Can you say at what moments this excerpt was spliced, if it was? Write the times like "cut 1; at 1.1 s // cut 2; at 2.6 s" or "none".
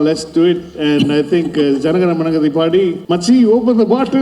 cut 1; at 3.0 s